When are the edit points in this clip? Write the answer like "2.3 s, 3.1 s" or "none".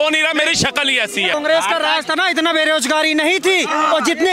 1.3 s